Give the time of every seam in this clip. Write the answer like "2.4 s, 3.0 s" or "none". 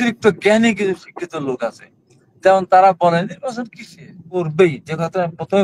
4.4 s